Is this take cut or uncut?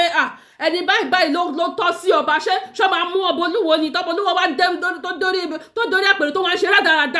uncut